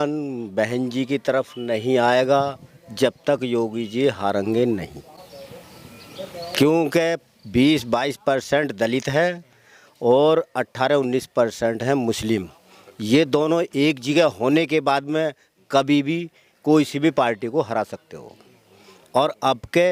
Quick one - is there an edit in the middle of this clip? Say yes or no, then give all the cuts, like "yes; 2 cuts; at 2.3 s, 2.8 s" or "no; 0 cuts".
no; 0 cuts